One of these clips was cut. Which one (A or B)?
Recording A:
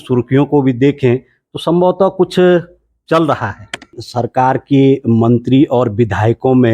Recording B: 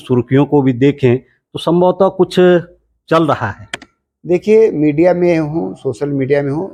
A